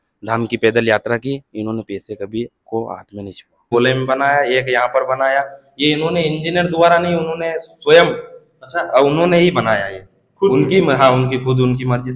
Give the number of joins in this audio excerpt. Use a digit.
1